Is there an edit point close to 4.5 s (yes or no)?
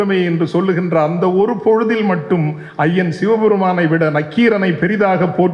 no